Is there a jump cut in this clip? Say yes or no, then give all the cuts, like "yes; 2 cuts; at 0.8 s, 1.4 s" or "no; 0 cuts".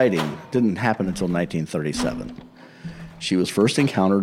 no; 0 cuts